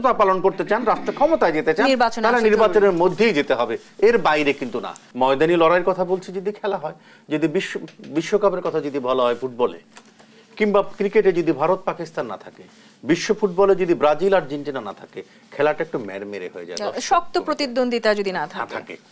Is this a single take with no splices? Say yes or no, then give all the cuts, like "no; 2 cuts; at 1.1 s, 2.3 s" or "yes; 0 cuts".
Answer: no; 1 cut; at 5.0 s